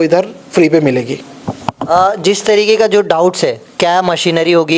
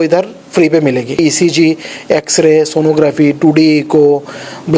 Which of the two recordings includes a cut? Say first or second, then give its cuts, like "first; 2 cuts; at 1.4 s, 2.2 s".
second; 1 cut; at 1.2 s